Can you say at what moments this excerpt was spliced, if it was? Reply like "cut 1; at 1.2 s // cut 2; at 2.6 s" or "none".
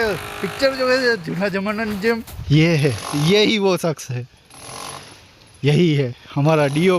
cut 1; at 2.3 s